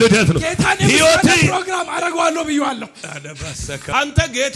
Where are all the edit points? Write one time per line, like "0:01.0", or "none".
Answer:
none